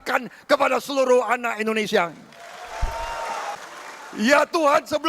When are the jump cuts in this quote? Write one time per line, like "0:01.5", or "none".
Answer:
0:03.6